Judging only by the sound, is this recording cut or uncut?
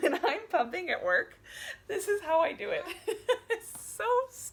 uncut